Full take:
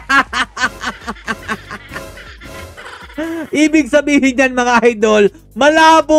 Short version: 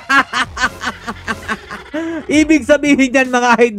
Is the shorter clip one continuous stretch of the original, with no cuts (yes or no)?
no